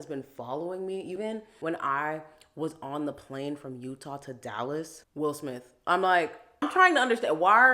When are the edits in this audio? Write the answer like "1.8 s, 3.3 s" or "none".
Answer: 1.2 s, 5.0 s, 6.7 s